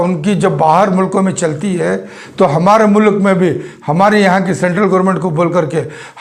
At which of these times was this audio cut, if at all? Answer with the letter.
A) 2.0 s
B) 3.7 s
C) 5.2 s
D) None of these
D